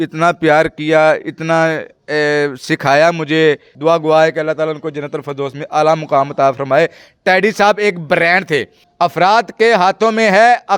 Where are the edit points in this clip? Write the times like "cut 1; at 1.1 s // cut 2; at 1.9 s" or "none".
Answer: cut 1; at 3.7 s // cut 2; at 8.8 s